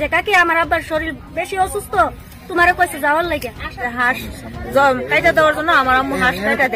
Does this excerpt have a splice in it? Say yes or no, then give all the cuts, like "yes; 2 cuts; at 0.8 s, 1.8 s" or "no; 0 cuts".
yes; 1 cut; at 3.9 s